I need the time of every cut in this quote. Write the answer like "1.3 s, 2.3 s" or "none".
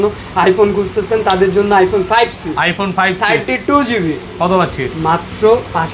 none